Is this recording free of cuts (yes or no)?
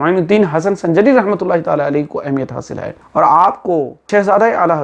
no